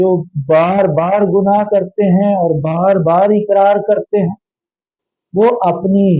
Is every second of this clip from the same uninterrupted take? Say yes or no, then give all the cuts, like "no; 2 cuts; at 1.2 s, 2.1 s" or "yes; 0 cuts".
yes; 0 cuts